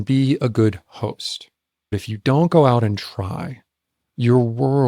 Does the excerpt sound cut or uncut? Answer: cut